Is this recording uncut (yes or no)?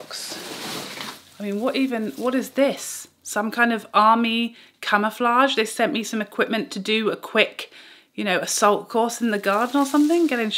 yes